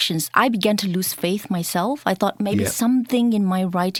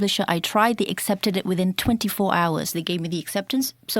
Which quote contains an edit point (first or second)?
second